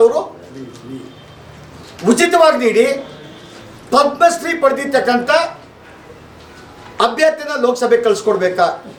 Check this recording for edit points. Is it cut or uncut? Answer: uncut